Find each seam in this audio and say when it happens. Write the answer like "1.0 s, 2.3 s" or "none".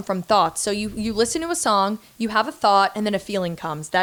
none